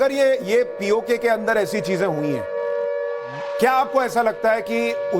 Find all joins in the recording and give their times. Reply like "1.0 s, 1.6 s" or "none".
3.6 s